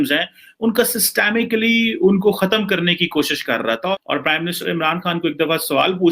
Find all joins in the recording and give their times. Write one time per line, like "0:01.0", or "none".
0:03.9